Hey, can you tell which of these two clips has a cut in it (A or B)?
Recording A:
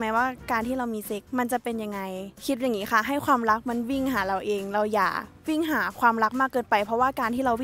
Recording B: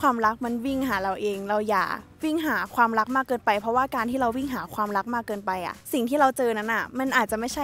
A